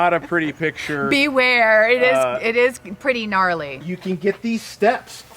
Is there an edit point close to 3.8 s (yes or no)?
yes